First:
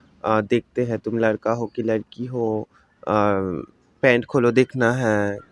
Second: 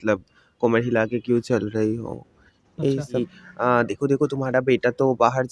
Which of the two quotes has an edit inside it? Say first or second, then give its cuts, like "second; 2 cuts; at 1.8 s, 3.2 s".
second; 1 cut; at 3.2 s